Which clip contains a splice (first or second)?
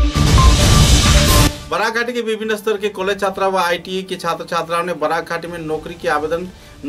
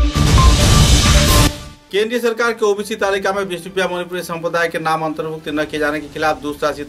second